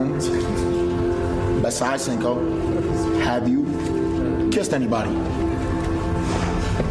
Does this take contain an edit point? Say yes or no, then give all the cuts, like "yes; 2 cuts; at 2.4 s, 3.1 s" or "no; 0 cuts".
no; 0 cuts